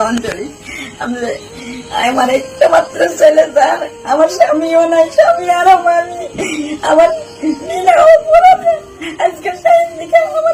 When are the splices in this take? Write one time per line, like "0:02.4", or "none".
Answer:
none